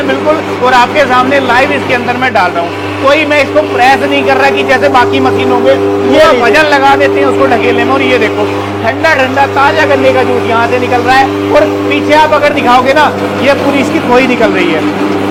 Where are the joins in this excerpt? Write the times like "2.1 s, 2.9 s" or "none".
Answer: none